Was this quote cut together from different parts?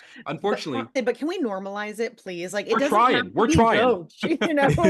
yes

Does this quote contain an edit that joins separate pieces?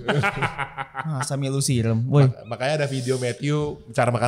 no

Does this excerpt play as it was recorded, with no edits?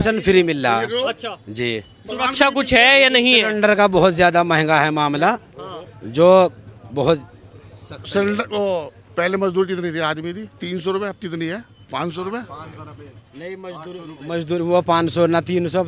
yes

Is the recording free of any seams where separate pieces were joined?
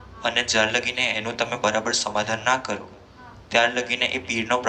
yes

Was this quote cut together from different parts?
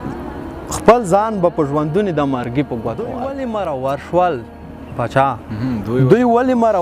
yes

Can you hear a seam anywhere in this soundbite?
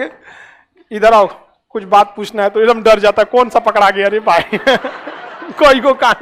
no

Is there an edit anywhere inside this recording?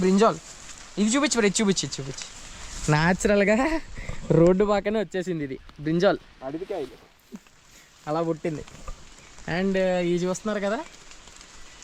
no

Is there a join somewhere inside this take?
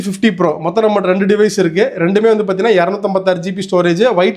no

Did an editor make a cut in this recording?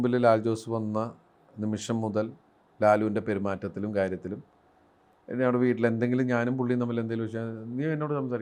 no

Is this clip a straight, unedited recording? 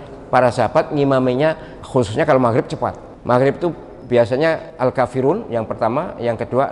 no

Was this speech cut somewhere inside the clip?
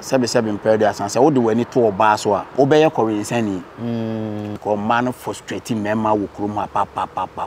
yes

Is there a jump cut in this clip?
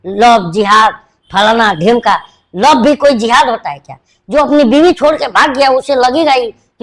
no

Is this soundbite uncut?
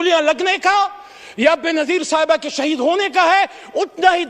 yes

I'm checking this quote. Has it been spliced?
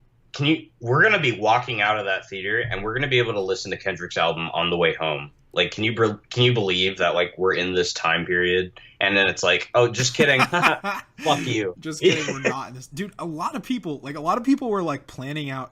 no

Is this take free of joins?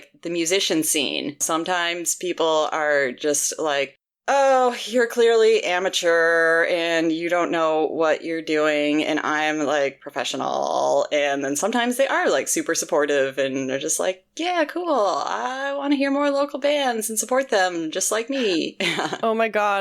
no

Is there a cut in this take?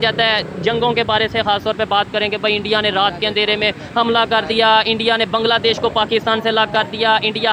no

